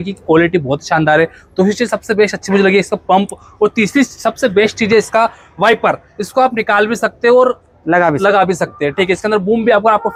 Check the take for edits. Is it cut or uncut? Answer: uncut